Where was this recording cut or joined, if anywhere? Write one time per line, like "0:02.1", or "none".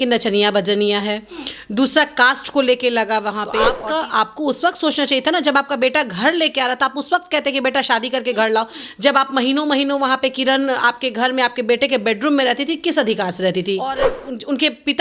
0:03.7
0:14.0